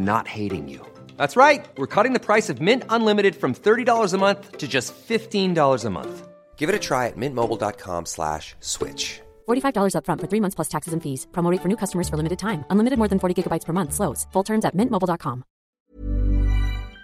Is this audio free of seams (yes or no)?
no